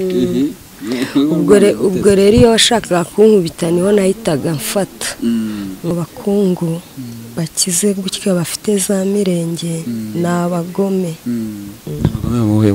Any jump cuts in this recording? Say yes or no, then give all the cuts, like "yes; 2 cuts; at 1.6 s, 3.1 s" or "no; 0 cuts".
yes; 1 cut; at 5.9 s